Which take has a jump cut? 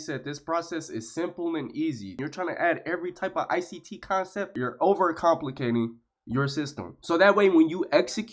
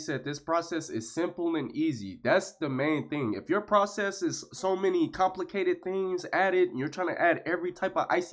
first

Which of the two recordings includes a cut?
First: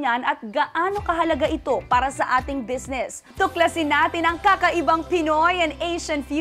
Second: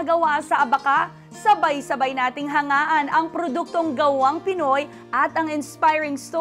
first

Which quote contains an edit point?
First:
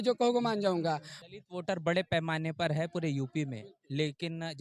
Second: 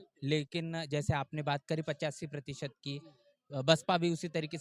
first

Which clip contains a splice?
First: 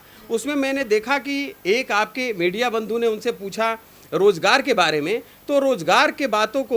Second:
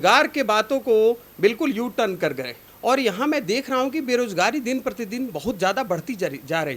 second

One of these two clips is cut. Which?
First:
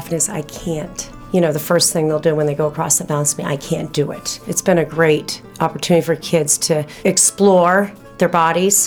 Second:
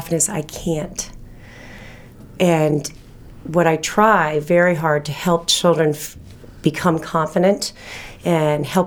first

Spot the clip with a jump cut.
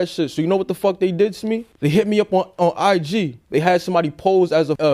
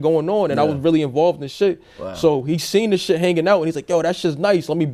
first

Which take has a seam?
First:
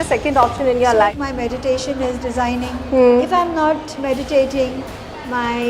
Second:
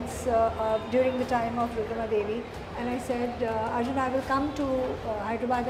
first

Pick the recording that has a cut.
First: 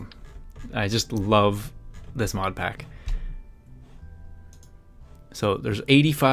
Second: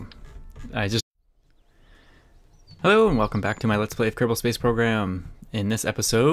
first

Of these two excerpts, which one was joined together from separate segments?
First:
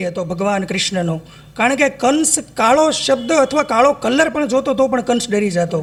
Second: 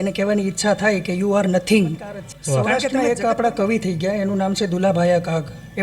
second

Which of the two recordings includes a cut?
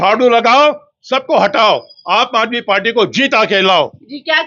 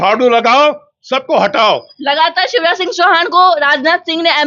second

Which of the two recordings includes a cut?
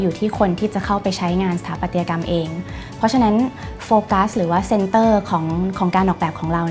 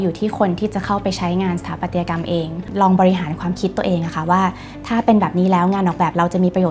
second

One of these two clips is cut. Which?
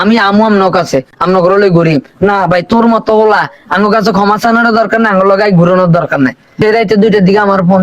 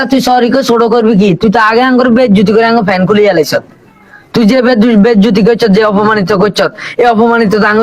first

